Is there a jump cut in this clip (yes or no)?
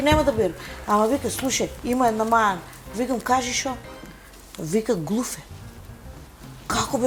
no